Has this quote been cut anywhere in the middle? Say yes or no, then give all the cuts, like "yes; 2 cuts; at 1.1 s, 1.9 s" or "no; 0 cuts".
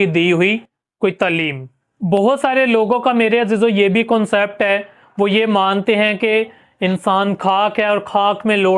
no; 0 cuts